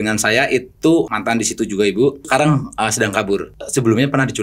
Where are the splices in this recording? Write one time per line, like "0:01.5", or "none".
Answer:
0:01.1
0:02.3
0:03.6